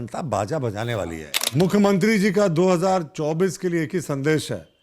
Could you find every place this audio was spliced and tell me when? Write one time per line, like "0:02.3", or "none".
0:01.3